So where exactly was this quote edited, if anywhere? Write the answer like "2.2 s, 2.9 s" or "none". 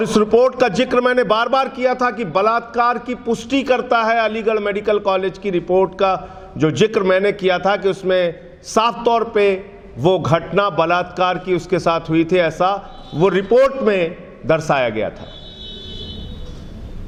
none

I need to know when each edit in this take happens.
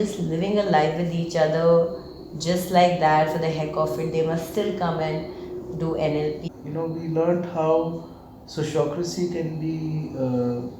6.5 s

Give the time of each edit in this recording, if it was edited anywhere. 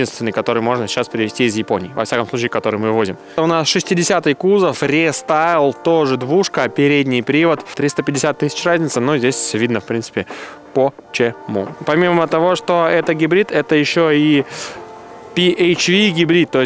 3.4 s, 7.7 s, 11.7 s

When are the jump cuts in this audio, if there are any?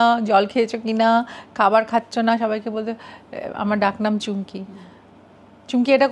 none

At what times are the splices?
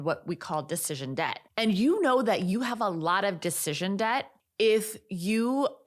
1.4 s, 4.4 s

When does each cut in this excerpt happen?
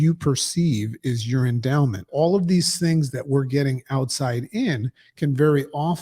2.1 s

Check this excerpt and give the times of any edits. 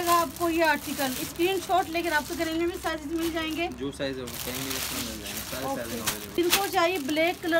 none

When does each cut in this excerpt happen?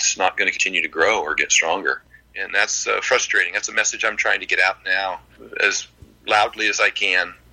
2.1 s, 5.4 s

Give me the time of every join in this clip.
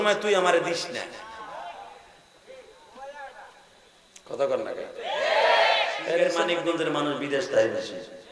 6.3 s

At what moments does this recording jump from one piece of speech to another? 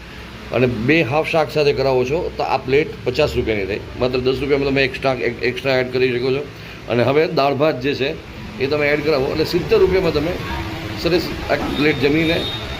none

